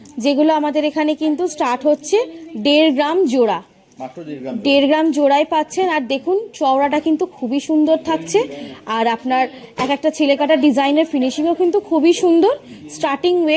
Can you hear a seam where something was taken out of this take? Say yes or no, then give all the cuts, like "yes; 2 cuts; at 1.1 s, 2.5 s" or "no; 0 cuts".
no; 0 cuts